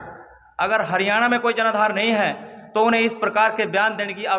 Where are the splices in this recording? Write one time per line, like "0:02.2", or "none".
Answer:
none